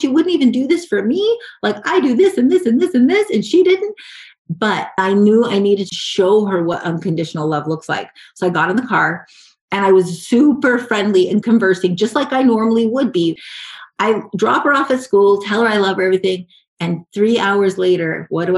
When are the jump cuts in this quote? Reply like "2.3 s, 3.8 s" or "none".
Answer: 4.9 s, 5.8 s, 11.4 s, 13.4 s